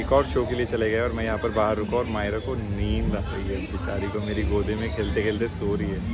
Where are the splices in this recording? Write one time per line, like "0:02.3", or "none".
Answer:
none